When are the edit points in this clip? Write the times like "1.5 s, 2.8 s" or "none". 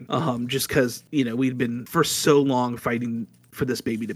1.0 s, 1.8 s